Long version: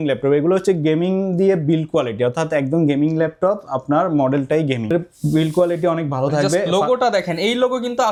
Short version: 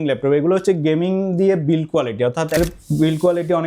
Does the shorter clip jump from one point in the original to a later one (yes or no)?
yes